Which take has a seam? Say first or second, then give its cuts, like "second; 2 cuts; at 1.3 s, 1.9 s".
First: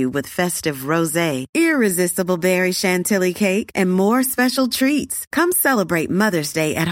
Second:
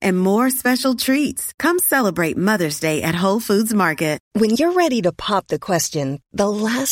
second; 1 cut; at 4.2 s